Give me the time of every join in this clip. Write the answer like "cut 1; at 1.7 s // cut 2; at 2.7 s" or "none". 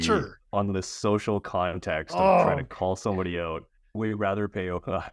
cut 1; at 3.9 s